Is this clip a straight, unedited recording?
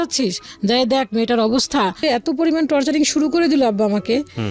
no; 1 cut; at 2.0 s

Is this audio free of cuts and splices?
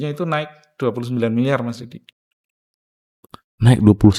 yes; 0 cuts

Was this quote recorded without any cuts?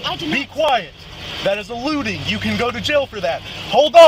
yes; 0 cuts

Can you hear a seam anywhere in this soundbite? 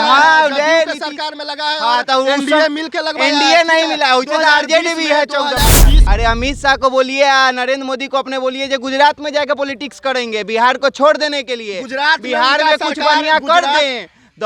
yes; 1 cut; at 6.0 s

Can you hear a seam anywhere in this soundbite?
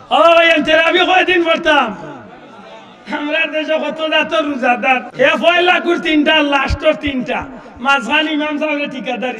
yes; 1 cut; at 5.1 s

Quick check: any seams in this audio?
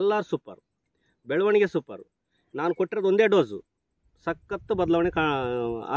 no; 0 cuts

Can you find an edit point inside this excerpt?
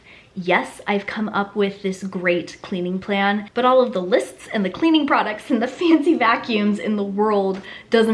yes; 1 cut; at 3.5 s

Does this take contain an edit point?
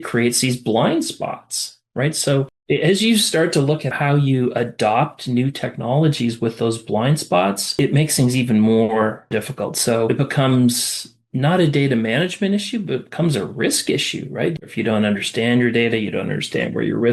yes; 3 cuts; at 2.6 s, 10.1 s, 14.7 s

